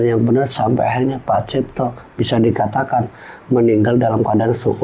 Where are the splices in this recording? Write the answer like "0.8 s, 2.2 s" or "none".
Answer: none

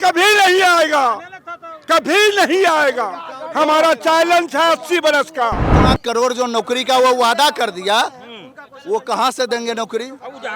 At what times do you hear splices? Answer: 5.8 s

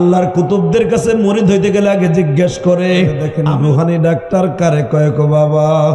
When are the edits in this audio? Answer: 3.3 s

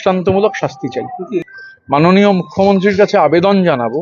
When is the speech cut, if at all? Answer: 1.5 s

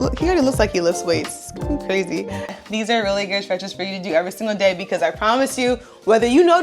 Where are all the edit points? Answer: 2.4 s

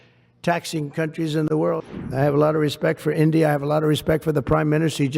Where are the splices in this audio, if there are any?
1.8 s

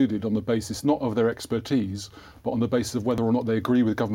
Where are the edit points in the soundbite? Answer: 3.2 s

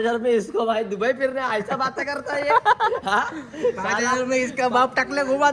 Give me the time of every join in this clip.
none

